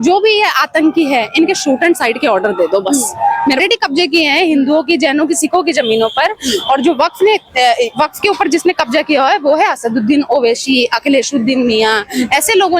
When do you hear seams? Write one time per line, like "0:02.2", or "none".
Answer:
0:03.6